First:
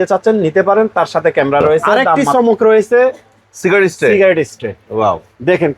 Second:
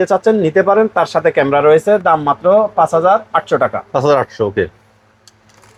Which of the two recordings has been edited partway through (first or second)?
first